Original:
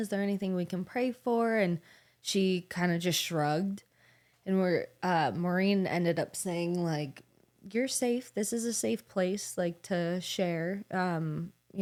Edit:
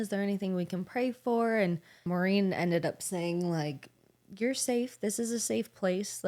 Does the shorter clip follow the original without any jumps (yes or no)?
no